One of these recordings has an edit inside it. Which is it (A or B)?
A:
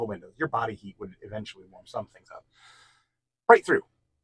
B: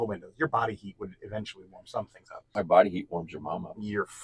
B